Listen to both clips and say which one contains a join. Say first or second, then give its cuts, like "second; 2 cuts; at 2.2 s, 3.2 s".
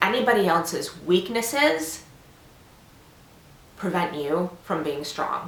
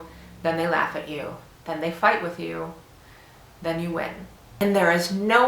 second; 1 cut; at 4.5 s